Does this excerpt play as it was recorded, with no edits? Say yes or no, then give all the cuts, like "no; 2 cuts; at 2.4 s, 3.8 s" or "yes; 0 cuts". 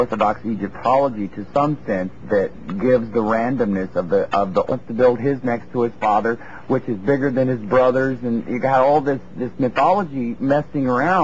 yes; 0 cuts